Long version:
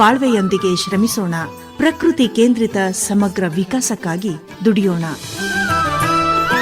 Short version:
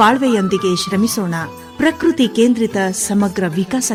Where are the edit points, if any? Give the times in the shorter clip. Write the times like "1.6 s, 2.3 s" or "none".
none

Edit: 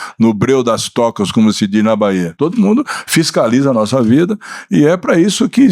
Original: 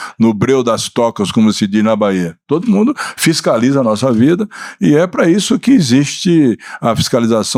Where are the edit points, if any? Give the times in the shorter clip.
2.3 s

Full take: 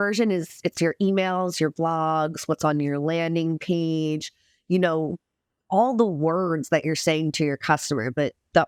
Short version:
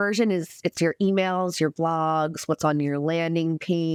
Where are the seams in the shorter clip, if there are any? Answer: none

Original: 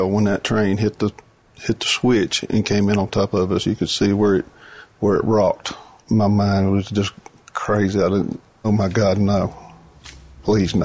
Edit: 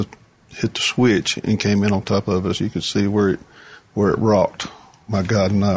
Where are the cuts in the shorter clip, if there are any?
4.9 s

